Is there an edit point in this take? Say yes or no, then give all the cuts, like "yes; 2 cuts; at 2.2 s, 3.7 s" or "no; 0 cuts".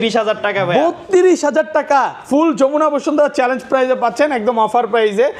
no; 0 cuts